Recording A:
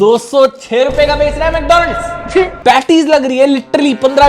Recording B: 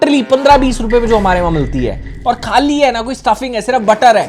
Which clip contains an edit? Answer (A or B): A